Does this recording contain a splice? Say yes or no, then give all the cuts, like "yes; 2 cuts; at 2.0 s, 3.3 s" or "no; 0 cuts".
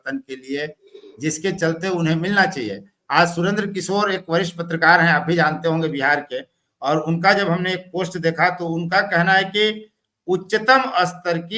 no; 0 cuts